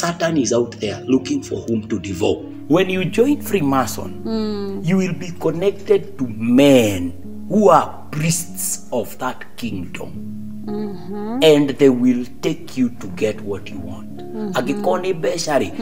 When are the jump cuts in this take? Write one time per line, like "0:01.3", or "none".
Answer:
0:02.5